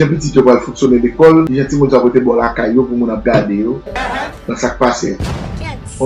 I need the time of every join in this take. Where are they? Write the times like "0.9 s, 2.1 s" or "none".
none